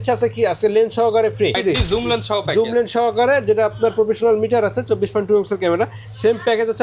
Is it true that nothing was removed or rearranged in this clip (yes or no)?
no